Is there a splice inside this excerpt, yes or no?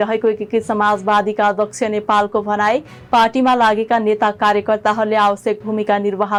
no